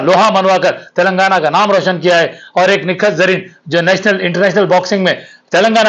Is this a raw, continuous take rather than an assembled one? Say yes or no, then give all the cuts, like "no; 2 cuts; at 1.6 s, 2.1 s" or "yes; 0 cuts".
yes; 0 cuts